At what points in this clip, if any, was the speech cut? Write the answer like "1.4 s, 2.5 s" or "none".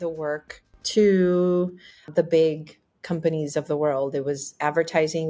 none